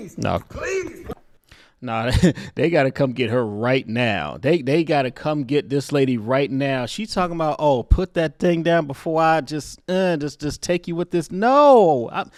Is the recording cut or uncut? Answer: uncut